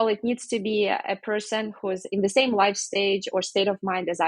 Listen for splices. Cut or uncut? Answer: cut